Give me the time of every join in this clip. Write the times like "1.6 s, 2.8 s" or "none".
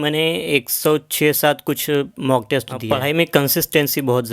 2.8 s